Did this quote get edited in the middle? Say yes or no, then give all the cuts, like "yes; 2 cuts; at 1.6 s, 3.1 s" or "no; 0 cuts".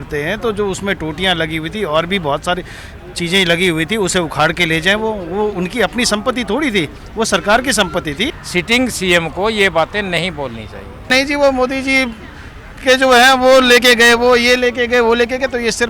yes; 2 cuts; at 8.3 s, 11.1 s